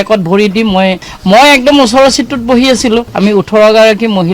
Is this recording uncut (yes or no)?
no